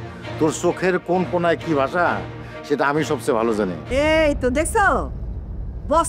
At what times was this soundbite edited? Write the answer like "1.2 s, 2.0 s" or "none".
3.8 s

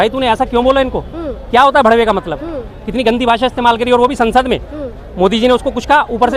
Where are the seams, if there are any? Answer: none

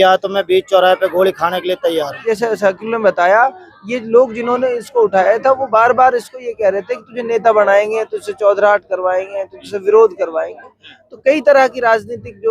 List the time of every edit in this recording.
2.2 s

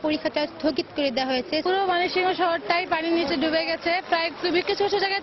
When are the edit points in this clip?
1.6 s

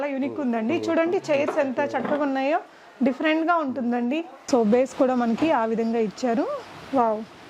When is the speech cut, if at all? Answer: 4.3 s

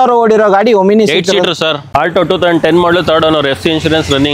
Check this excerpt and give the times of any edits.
1.8 s

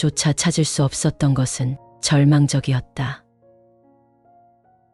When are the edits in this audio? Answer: 3.6 s

